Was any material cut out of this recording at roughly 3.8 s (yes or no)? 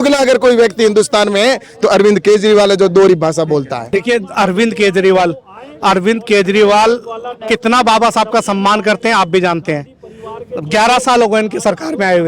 yes